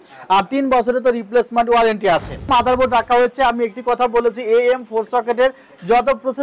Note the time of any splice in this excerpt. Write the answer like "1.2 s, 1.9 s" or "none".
2.5 s

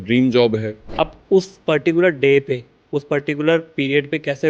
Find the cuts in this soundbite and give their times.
1.0 s

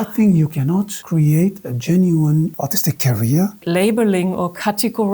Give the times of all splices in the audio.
1.0 s, 2.5 s, 3.6 s

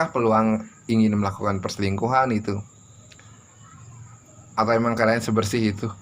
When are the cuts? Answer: none

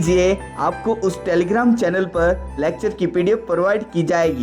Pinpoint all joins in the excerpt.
none

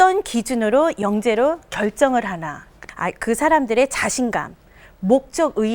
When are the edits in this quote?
2.8 s

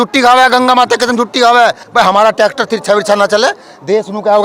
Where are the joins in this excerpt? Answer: 1.8 s

